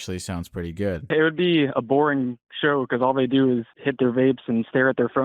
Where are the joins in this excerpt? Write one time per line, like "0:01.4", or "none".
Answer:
0:01.1
0:03.8